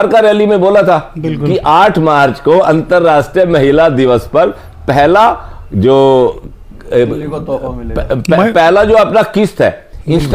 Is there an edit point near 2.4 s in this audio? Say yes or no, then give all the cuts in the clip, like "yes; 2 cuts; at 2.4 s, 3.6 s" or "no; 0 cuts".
no; 0 cuts